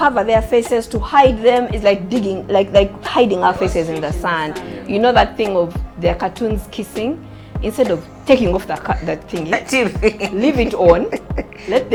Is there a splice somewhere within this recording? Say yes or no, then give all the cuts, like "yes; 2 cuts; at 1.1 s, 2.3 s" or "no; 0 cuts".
no; 0 cuts